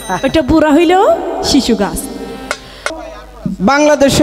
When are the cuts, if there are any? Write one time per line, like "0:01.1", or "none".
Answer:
0:02.8